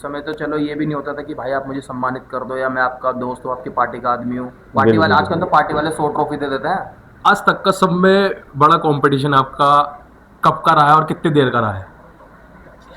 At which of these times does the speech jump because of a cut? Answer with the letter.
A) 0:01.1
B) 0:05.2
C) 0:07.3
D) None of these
C